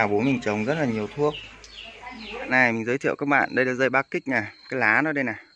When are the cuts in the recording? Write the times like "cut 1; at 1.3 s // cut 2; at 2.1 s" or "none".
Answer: cut 1; at 2.5 s